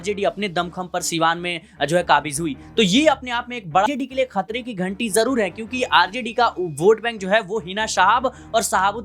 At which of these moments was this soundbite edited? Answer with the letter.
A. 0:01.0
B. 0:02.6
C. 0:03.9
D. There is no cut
C